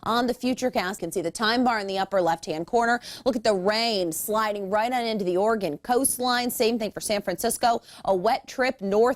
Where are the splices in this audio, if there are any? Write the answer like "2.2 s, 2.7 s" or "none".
1.0 s